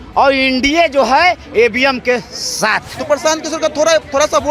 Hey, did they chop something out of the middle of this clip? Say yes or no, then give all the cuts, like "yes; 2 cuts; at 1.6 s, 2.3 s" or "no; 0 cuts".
yes; 1 cut; at 2.9 s